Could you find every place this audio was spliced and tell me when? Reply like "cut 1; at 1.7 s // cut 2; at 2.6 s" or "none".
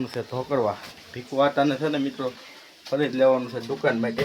none